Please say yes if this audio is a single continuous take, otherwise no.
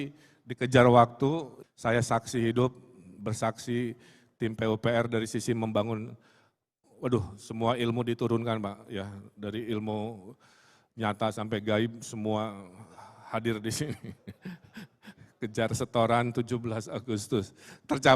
no